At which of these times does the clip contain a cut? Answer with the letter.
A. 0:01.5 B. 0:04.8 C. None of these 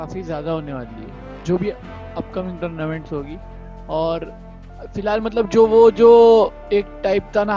C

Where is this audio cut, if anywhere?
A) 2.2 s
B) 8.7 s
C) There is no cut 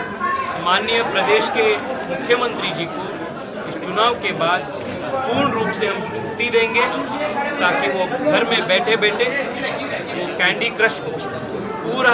C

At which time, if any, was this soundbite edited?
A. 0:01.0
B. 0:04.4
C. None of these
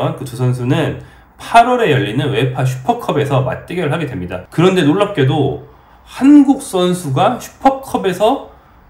B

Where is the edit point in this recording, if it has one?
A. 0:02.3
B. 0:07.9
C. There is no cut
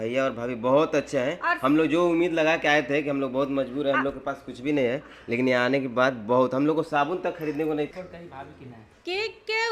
B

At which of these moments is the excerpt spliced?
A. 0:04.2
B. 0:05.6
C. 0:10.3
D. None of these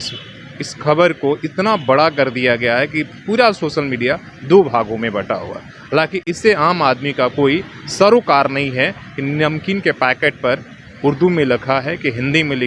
D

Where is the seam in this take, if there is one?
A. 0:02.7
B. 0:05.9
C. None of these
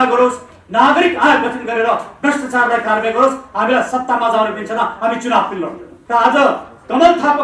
B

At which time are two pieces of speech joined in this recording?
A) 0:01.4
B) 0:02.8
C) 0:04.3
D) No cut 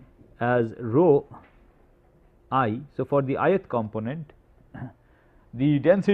D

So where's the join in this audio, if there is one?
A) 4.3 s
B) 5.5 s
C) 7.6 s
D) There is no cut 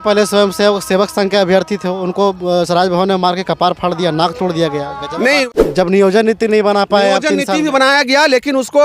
B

